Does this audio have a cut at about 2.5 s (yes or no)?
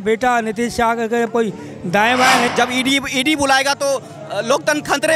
yes